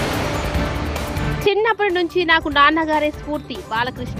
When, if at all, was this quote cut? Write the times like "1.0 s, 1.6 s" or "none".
1.2 s